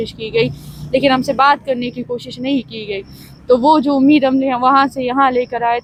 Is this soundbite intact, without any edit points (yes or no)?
yes